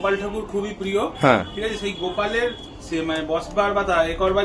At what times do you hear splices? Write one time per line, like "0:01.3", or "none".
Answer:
none

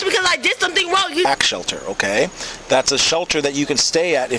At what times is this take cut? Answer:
0:01.2

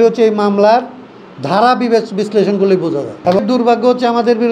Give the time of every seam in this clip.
0:03.1

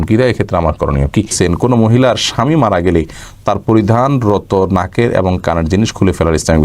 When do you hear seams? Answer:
0:01.3

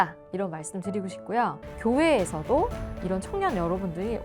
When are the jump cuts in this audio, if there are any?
0:01.7

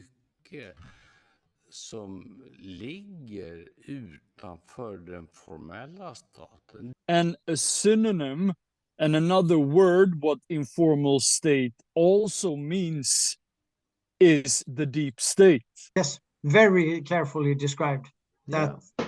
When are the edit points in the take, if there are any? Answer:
0:15.8

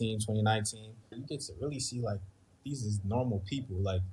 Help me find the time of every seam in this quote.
0:01.2

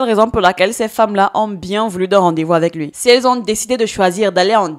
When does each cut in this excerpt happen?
0:02.9

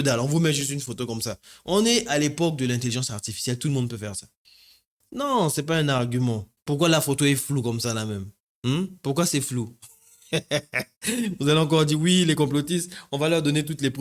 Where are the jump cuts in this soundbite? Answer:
0:06.5

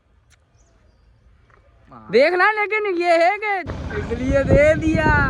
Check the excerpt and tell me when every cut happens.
0:03.8

